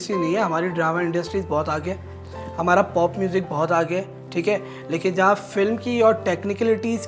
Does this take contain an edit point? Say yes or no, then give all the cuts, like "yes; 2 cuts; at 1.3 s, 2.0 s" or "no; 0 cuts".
no; 0 cuts